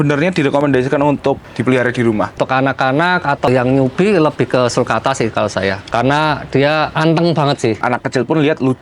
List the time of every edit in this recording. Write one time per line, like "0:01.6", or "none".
0:02.4
0:03.5
0:05.8
0:06.9
0:07.8